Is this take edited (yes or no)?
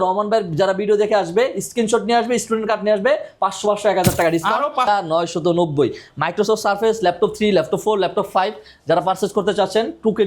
yes